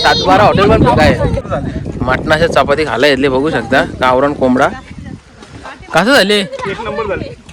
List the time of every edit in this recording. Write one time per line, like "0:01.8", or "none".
0:01.4

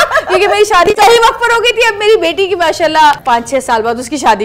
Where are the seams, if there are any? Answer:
0:00.9
0:03.2

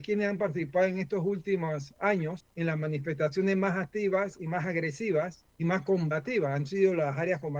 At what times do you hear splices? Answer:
0:02.4
0:05.4

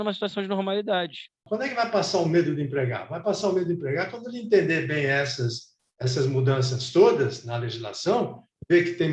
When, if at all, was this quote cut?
0:01.4

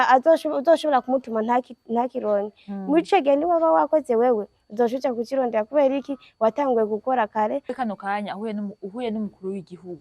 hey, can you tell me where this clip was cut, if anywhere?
0:07.7

